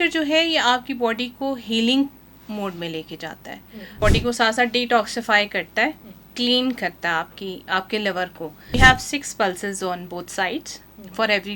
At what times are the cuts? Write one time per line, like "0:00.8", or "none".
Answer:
0:03.9
0:08.7